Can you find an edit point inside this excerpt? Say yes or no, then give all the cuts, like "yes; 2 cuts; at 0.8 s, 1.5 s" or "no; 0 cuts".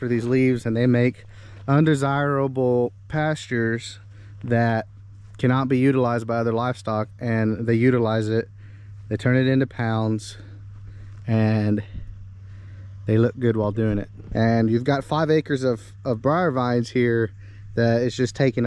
yes; 1 cut; at 14.2 s